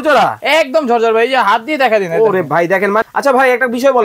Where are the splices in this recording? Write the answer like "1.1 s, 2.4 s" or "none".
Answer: 3.0 s